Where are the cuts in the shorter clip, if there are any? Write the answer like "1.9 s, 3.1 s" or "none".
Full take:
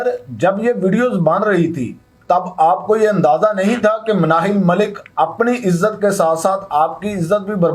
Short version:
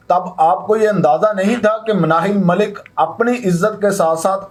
none